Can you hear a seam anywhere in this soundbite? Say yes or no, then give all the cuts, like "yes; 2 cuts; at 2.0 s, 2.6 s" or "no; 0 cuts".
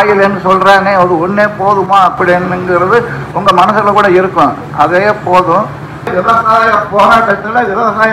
yes; 1 cut; at 6.1 s